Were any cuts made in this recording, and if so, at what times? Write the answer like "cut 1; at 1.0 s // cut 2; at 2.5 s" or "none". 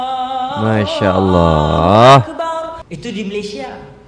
cut 1; at 2.8 s